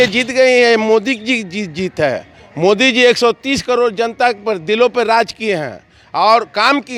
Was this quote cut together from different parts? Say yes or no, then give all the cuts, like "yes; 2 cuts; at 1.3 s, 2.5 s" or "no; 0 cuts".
no; 0 cuts